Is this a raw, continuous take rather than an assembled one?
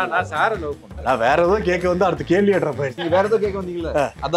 no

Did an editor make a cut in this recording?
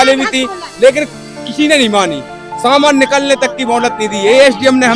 no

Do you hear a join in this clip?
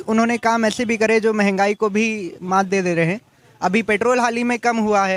no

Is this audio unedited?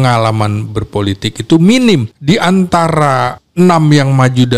no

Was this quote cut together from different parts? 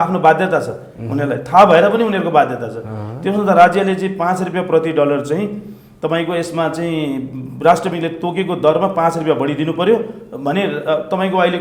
no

